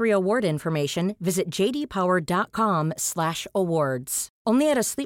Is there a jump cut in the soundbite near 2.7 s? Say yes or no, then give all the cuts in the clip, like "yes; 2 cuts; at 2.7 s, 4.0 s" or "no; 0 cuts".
no; 0 cuts